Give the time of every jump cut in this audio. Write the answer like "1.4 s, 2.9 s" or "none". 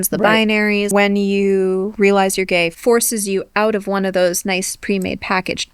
0.9 s, 1.9 s, 2.7 s